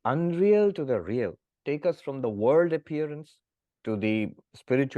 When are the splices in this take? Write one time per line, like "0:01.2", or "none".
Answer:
0:01.5